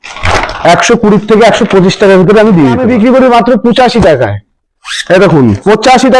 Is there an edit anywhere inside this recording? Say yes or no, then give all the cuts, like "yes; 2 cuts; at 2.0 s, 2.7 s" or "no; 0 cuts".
yes; 1 cut; at 2.8 s